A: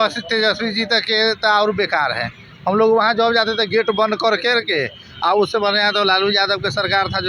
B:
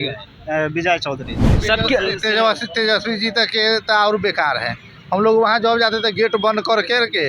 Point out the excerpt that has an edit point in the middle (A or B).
B